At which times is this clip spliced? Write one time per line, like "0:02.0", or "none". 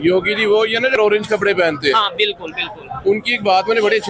0:01.0